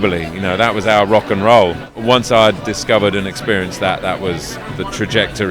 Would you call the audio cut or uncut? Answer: cut